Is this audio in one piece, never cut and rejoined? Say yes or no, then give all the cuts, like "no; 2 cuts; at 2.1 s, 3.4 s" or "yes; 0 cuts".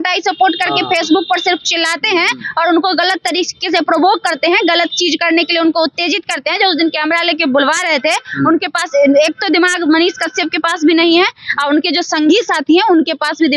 yes; 0 cuts